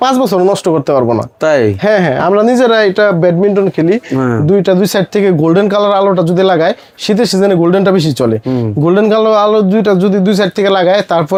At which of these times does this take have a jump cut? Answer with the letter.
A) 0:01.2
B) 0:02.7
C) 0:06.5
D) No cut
D